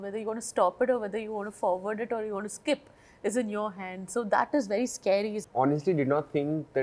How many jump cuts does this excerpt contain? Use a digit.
1